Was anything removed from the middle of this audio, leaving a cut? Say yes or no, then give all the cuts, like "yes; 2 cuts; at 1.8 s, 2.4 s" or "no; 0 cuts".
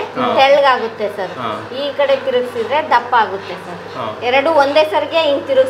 no; 0 cuts